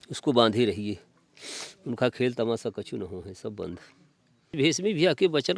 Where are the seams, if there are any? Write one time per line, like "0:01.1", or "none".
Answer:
0:04.5